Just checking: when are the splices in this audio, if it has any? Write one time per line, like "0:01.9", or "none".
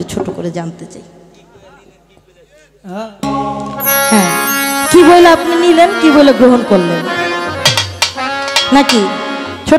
none